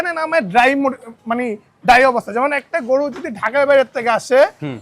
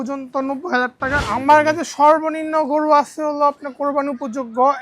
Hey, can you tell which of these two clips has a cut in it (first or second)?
second